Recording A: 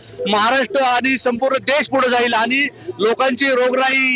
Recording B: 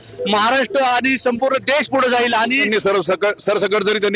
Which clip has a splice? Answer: B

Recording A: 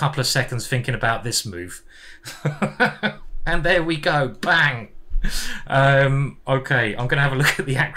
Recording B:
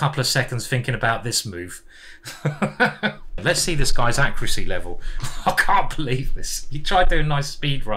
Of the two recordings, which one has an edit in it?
B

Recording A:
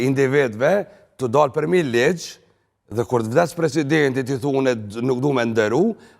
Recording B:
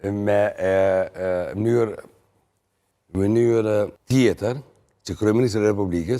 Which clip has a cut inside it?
B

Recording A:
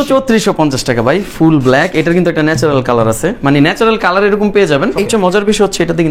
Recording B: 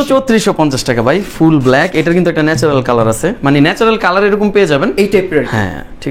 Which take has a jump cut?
A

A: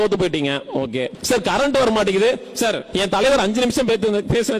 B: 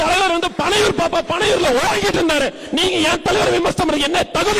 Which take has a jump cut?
A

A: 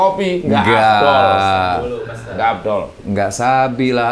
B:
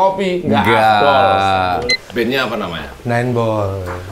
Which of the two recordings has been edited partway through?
B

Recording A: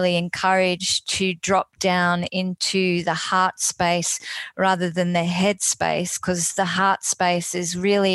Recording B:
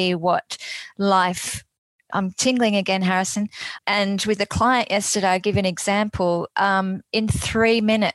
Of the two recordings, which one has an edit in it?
B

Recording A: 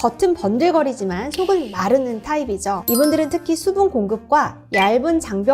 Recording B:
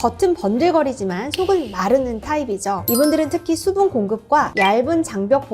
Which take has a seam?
B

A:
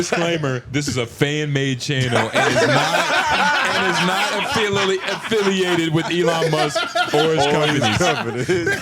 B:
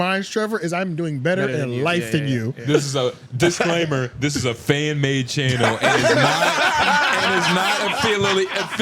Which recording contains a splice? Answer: B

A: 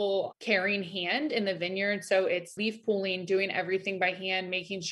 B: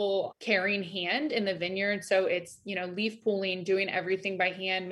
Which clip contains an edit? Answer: A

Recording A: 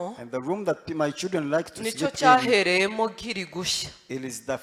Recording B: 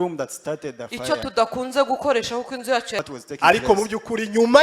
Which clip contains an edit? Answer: B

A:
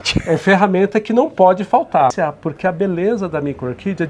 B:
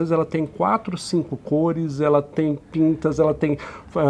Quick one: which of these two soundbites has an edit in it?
A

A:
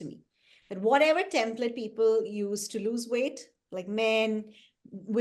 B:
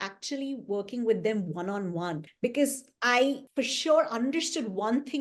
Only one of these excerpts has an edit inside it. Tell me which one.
B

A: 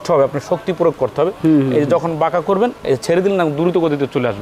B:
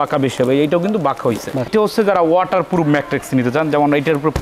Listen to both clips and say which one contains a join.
B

